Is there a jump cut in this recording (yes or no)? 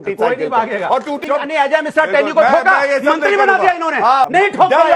yes